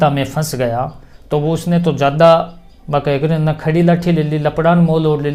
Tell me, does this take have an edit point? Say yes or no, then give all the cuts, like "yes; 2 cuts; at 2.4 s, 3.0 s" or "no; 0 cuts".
no; 0 cuts